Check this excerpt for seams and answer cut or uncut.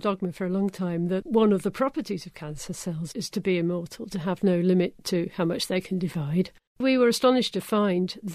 cut